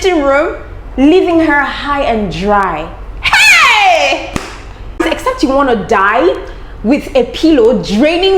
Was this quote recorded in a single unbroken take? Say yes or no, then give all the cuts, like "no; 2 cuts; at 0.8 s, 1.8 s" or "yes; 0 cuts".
no; 1 cut; at 5.0 s